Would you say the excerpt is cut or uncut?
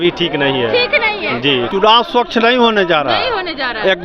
cut